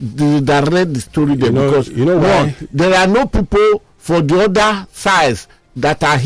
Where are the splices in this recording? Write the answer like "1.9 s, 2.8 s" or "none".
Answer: none

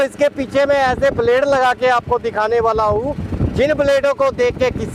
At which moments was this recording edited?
none

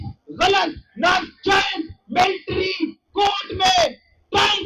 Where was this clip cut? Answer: none

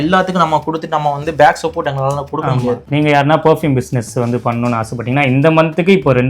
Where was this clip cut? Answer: 2.8 s

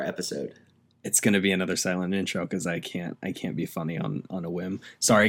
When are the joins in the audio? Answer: none

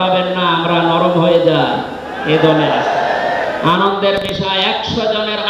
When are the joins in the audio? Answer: 3.6 s

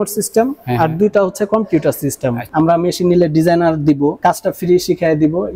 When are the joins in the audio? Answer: 2.5 s

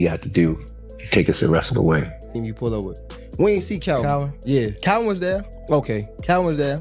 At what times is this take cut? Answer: 2.4 s

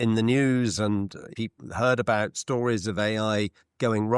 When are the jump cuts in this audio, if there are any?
1.3 s

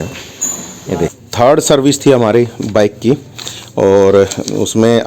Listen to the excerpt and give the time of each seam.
1.1 s

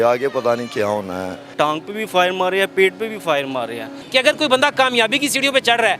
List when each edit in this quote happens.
1.4 s, 4.0 s

